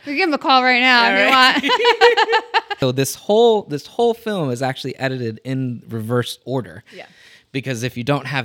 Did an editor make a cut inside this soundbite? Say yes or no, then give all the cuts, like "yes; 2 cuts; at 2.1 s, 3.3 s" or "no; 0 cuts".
yes; 1 cut; at 2.7 s